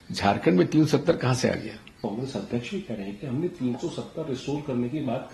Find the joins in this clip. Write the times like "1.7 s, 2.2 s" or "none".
none